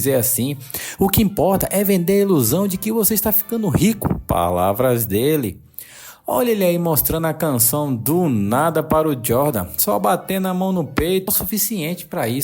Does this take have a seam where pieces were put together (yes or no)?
yes